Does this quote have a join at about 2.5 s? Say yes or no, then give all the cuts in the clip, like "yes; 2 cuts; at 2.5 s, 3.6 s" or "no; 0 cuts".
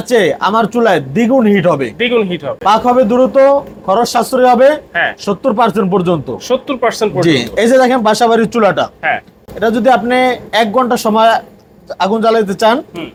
no; 0 cuts